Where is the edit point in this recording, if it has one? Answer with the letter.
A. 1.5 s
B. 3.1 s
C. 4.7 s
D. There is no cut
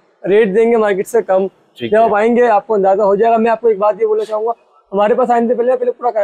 D